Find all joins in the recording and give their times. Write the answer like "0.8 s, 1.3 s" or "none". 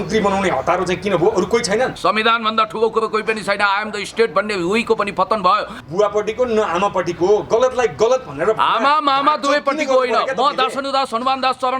2.0 s, 5.8 s